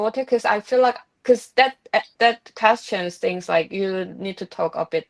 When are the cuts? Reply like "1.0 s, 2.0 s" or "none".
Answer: none